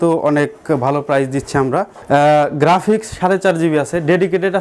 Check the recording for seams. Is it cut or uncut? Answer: cut